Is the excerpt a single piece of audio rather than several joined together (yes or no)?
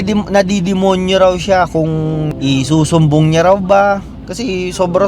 no